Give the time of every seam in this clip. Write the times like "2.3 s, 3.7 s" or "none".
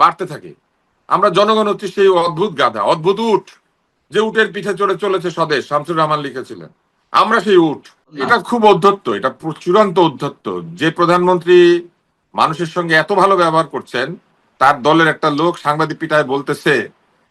8.2 s